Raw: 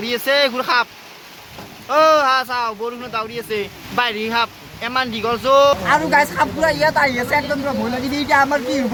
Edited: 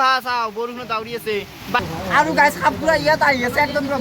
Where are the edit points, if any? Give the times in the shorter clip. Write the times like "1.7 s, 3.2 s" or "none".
2.0 s

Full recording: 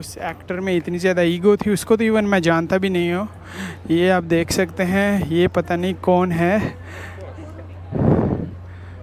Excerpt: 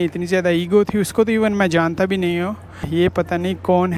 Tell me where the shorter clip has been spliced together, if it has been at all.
2.9 s

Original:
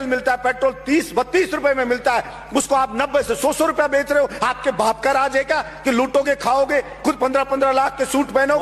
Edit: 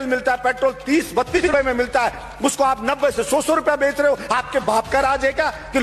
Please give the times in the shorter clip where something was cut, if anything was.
1.4 s

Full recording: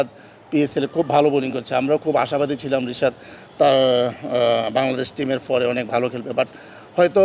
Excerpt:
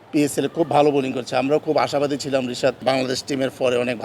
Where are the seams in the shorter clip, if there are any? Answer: 2.8 s

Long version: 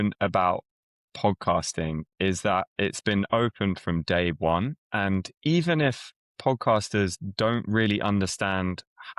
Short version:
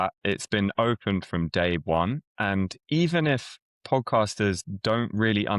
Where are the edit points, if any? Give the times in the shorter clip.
none

